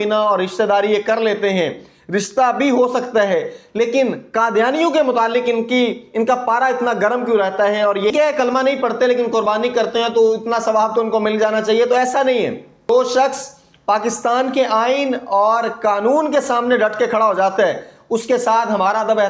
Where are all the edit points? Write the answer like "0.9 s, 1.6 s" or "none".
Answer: 8.1 s, 12.9 s